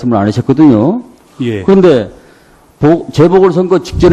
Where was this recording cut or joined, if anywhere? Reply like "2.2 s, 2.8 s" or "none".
2.8 s